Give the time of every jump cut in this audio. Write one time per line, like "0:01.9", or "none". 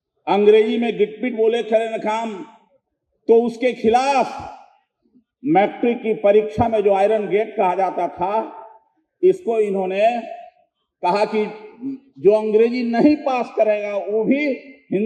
none